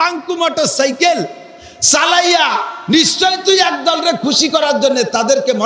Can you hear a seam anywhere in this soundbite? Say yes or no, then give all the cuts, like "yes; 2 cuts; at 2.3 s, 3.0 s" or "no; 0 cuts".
no; 0 cuts